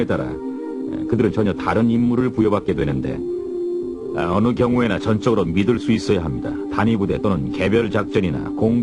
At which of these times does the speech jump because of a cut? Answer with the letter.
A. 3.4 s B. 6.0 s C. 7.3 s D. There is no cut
D